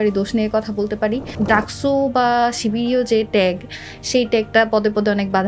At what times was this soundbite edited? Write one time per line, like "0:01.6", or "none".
0:01.3